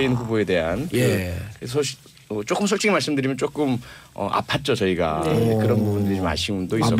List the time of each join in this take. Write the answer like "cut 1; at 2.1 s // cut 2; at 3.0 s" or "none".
cut 1; at 2.8 s